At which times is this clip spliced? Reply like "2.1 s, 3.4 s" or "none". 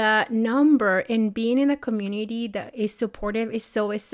none